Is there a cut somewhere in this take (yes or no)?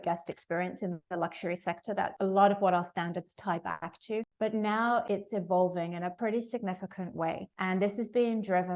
no